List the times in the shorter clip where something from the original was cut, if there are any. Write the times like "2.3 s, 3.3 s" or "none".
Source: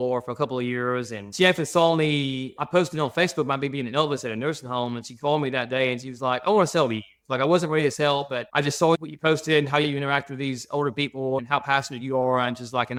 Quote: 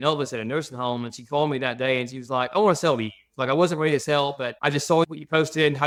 none